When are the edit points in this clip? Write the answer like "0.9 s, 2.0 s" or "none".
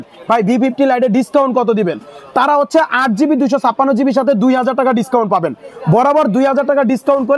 none